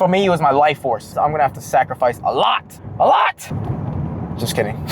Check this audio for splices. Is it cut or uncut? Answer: cut